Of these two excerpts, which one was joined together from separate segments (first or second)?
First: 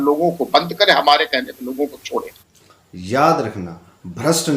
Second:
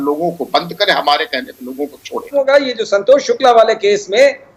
first